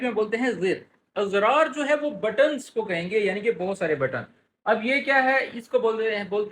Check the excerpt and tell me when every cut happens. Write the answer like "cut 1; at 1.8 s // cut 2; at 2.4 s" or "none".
cut 1; at 1.0 s